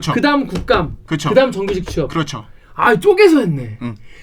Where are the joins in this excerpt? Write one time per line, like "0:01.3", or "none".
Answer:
none